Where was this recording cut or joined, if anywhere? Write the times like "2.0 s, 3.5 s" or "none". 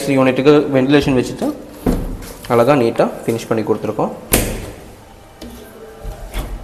none